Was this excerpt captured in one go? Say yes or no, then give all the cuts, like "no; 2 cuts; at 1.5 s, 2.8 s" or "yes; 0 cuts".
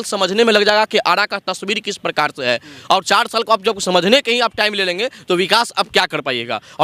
yes; 0 cuts